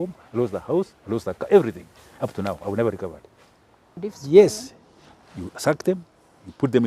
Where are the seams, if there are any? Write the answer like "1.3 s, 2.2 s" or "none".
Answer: 3.9 s